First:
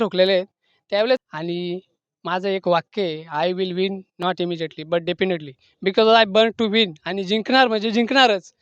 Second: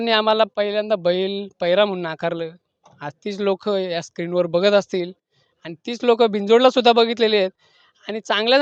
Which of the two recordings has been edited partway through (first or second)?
first